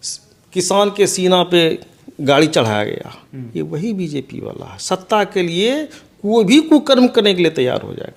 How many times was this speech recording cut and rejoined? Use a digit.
0